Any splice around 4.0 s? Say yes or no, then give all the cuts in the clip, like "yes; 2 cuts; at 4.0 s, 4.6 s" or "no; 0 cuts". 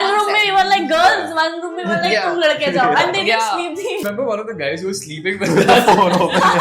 yes; 1 cut; at 4.0 s